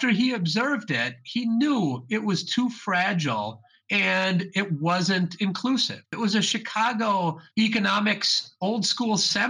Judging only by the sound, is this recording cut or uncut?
cut